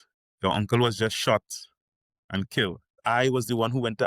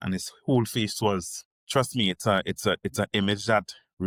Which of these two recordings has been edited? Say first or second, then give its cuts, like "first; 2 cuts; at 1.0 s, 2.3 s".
first; 1 cut; at 3.0 s